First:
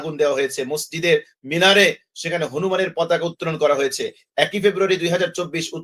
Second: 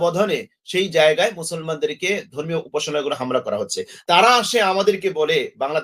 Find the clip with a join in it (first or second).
second